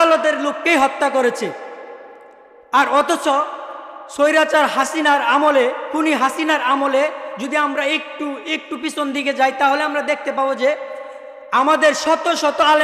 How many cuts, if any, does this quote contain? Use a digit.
0